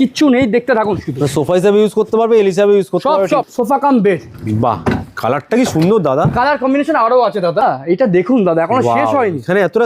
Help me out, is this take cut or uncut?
cut